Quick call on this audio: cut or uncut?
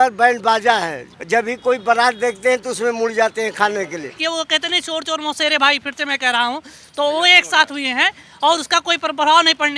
cut